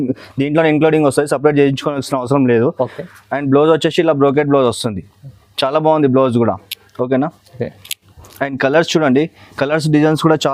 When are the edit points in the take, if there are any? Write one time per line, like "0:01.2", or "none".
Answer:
none